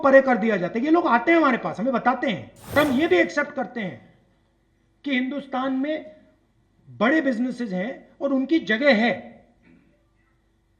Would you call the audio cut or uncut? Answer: cut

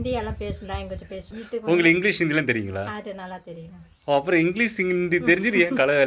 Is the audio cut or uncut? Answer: cut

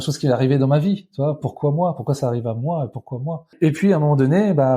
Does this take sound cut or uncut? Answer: cut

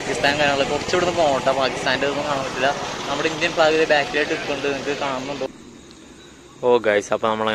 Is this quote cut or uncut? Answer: cut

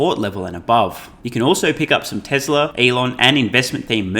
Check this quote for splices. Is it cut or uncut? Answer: cut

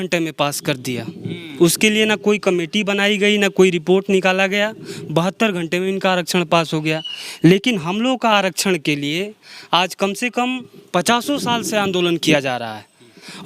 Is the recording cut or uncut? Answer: uncut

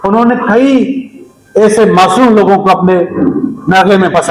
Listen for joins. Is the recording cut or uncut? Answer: uncut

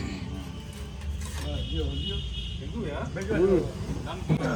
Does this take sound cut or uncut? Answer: uncut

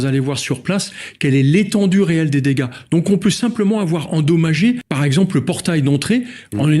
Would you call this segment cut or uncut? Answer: cut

